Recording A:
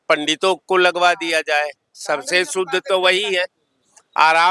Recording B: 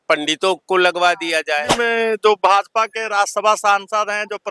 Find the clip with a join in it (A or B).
B